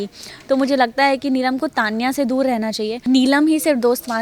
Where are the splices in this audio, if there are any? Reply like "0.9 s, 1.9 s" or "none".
3.0 s